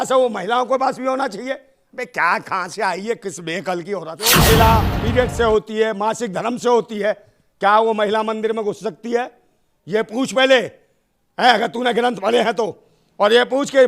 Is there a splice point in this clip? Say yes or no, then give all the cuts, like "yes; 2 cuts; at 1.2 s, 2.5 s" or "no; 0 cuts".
yes; 1 cut; at 4.4 s